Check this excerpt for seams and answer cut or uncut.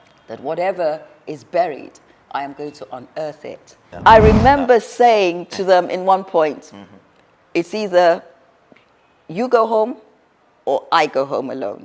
cut